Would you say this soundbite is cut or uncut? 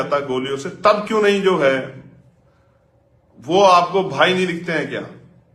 uncut